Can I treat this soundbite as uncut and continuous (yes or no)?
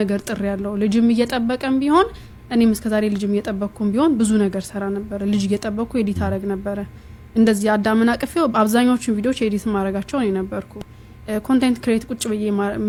yes